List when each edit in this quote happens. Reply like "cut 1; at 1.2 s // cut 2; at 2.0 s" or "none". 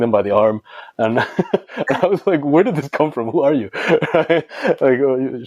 none